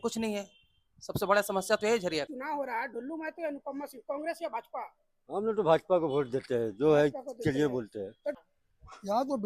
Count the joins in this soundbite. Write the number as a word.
two